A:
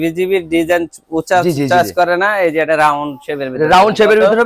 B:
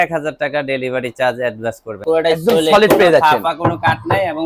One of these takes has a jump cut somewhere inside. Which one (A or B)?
B